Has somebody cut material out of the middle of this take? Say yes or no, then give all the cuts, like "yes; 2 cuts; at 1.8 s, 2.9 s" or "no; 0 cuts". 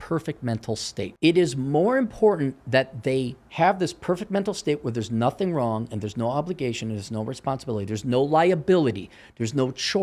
yes; 1 cut; at 1.0 s